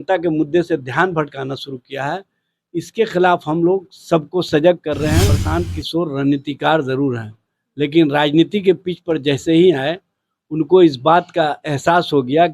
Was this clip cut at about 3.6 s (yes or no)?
no